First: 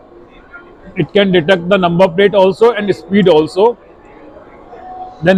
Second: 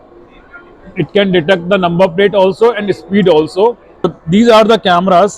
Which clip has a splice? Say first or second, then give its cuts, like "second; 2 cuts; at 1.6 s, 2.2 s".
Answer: second; 1 cut; at 4.0 s